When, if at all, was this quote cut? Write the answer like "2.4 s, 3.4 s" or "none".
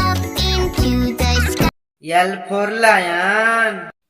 1.9 s